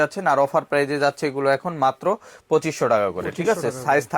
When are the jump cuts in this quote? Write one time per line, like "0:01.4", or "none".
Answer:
none